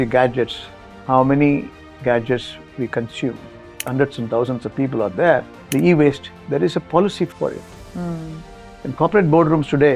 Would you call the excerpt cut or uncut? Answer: cut